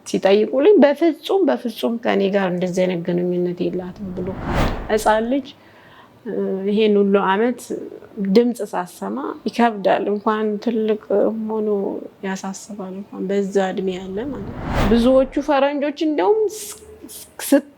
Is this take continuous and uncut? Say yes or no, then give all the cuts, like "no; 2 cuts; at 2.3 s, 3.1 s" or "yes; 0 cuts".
no; 2 cuts; at 4.7 s, 14.7 s